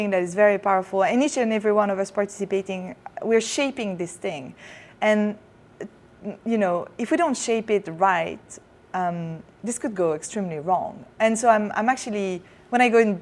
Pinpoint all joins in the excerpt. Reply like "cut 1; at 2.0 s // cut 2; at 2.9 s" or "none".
none